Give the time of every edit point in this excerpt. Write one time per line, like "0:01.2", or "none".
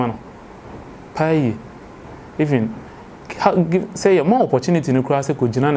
none